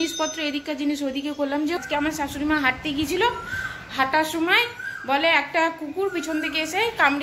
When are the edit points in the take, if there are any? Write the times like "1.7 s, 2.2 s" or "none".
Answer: 1.8 s